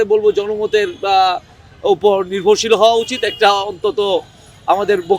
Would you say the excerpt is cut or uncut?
uncut